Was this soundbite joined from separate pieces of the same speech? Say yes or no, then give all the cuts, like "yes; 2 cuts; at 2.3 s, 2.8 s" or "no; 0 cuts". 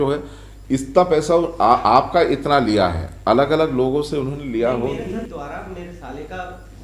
yes; 1 cut; at 5.0 s